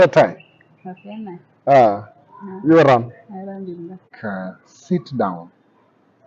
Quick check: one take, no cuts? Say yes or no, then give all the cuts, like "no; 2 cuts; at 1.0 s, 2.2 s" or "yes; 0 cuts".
no; 1 cut; at 4.0 s